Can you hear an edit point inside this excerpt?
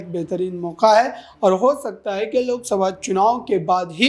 no; 0 cuts

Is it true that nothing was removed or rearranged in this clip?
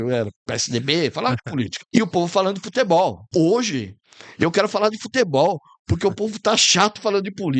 no; 2 cuts; at 1.8 s, 3.2 s

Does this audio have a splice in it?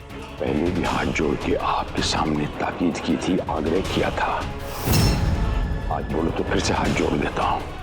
no; 0 cuts

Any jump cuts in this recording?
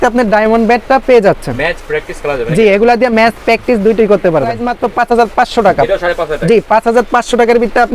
yes; 1 cut; at 4.7 s

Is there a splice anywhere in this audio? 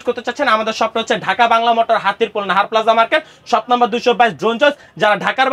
no; 0 cuts

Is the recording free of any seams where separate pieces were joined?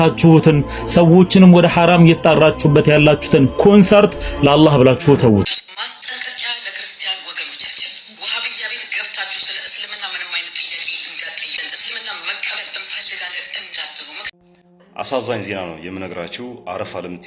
no; 2 cuts; at 5.6 s, 14.3 s

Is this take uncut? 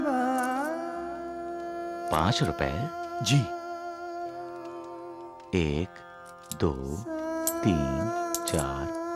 yes; 0 cuts

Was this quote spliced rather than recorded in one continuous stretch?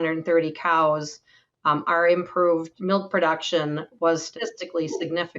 yes; 2 cuts; at 2.7 s, 4.3 s

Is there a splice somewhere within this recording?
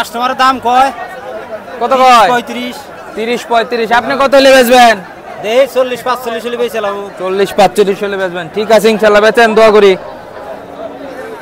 no; 0 cuts

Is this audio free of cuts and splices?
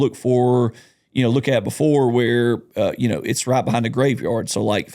yes; 0 cuts

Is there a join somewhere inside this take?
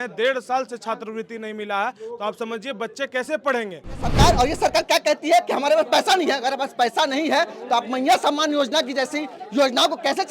yes; 1 cut; at 4.1 s

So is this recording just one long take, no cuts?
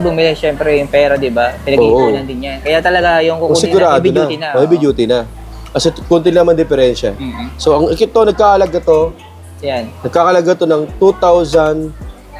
yes; 0 cuts

